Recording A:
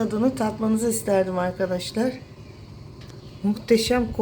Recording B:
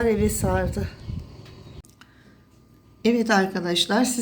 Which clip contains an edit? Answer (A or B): B